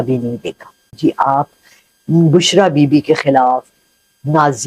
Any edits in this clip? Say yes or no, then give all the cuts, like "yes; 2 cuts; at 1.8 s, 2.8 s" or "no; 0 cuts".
yes; 1 cut; at 1.0 s